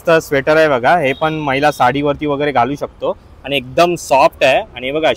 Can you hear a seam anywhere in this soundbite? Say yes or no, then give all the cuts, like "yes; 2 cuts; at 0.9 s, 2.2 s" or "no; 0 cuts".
no; 0 cuts